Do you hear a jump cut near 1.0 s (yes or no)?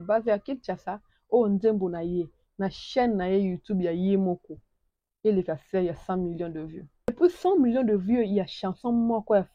no